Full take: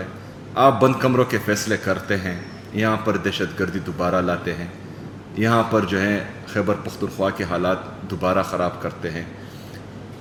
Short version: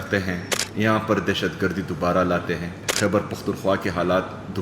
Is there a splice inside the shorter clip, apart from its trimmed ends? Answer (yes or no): yes